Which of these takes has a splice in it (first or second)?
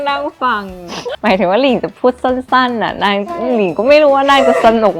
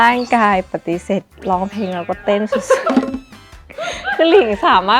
first